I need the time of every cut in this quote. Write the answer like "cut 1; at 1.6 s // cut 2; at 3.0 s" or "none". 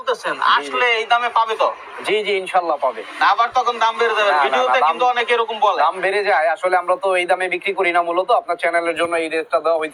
none